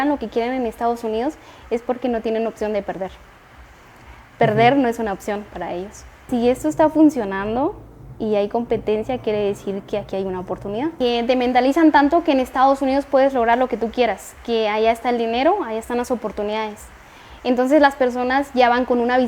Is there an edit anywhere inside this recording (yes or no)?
yes